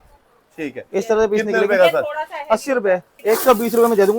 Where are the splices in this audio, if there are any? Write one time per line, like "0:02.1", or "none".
0:03.1